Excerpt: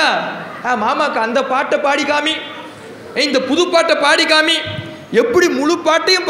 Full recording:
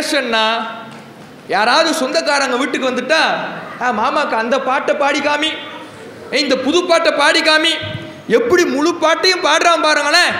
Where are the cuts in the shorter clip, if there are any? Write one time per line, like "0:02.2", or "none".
none